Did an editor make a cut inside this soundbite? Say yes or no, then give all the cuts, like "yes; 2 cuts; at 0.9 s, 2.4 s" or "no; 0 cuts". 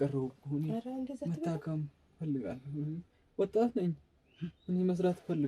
no; 0 cuts